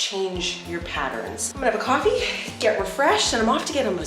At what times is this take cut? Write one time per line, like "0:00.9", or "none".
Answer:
0:01.6